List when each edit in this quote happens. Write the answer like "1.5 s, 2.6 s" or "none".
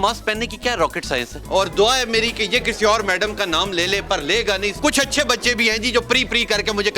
1.4 s, 4.8 s